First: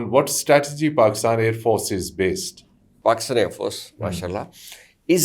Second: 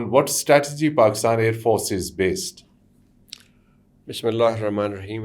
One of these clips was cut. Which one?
first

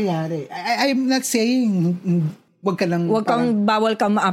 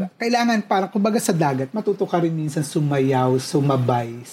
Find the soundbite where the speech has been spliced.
first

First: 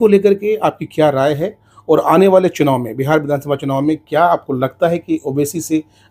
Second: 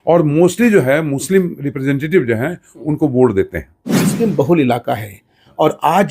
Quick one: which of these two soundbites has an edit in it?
second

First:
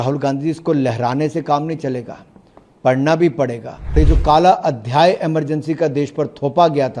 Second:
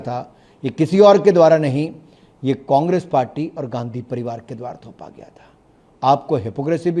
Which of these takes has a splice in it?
first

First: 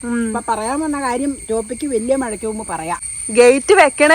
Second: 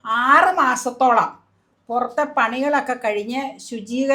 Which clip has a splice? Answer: first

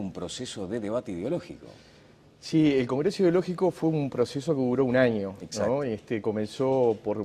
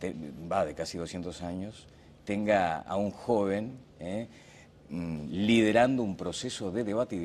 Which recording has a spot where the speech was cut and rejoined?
second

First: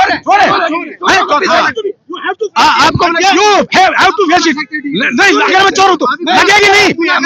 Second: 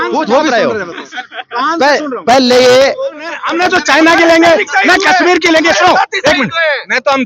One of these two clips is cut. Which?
second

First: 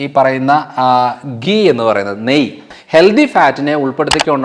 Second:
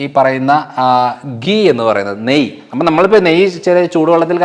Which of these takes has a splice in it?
first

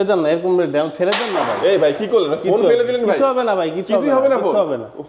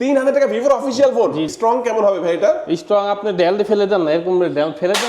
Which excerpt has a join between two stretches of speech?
second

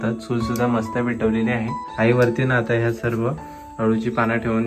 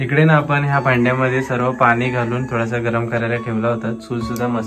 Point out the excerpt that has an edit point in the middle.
first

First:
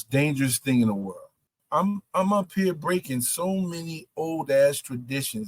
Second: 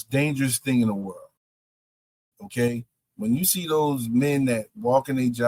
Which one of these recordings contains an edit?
first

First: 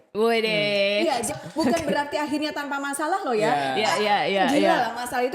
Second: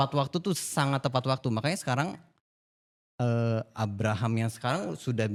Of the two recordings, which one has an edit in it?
first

